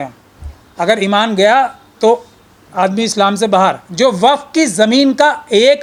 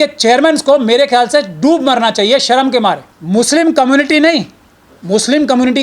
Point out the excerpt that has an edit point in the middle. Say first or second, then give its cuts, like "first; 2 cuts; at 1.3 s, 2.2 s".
second; 1 cut; at 3.1 s